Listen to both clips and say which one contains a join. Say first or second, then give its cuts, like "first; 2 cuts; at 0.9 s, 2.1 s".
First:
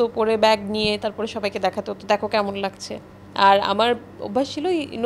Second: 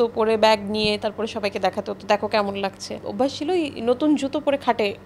second; 1 cut; at 3.0 s